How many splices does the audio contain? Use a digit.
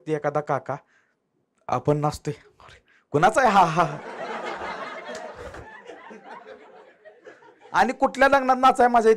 0